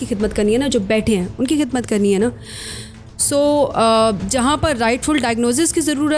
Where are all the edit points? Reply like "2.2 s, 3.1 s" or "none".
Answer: none